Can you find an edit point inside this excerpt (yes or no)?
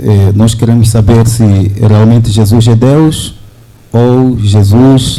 no